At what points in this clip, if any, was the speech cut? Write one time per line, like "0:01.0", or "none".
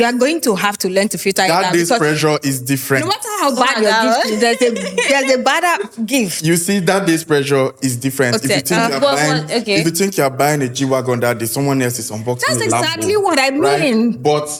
none